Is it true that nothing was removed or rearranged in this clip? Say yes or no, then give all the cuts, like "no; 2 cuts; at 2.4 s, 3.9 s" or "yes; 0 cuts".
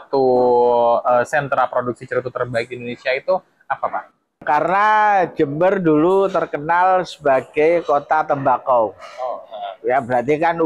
yes; 0 cuts